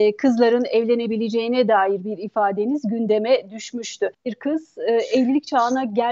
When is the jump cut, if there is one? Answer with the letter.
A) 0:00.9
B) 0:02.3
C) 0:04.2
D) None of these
C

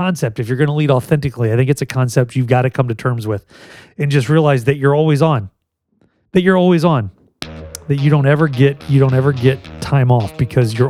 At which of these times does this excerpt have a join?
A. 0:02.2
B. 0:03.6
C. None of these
C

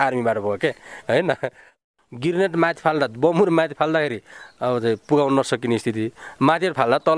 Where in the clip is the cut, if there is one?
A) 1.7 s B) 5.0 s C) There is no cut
A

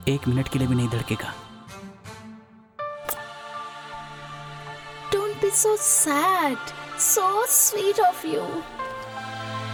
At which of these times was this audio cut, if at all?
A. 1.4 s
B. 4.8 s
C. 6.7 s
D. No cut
D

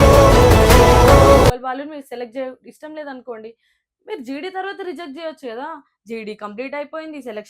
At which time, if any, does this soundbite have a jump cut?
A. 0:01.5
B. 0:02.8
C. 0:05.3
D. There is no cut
A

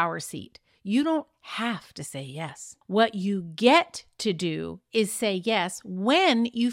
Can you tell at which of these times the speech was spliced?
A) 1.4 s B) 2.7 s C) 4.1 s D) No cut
B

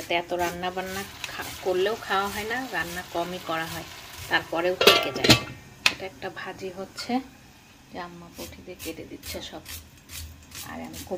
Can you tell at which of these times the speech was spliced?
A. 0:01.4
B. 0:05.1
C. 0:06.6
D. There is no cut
D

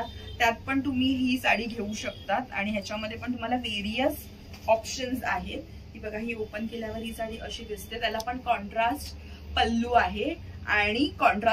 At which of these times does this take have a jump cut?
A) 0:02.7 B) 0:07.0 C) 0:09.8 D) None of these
D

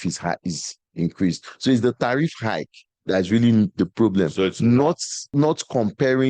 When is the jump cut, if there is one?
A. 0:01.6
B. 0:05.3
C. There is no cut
B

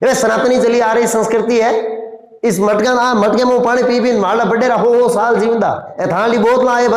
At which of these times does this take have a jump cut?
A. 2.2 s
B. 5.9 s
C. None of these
B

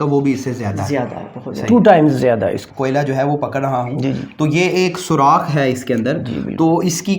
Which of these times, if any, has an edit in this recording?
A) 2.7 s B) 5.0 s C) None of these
A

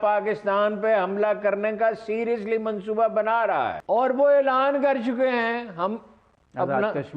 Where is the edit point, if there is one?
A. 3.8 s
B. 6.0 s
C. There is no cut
A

